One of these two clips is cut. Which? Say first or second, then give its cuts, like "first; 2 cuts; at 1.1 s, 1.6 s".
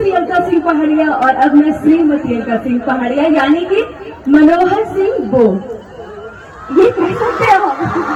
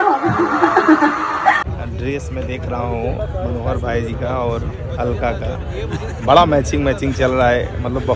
second; 1 cut; at 1.7 s